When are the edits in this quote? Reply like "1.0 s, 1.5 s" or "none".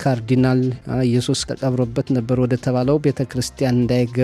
0.9 s